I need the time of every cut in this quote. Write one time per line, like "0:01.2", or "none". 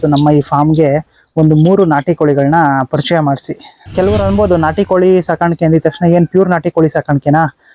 0:03.9